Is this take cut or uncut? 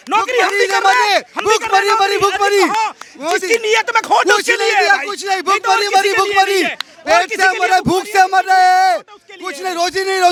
uncut